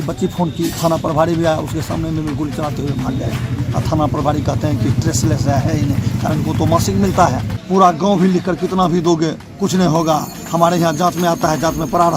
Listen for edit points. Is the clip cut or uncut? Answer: cut